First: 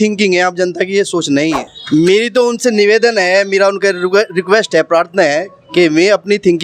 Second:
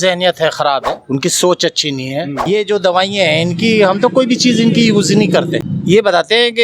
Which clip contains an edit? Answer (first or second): second